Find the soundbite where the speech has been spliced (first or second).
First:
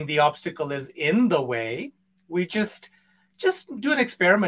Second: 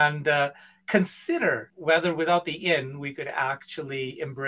second